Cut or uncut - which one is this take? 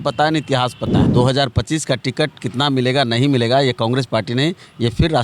cut